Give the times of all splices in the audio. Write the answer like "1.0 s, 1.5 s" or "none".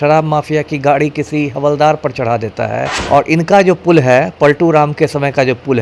2.9 s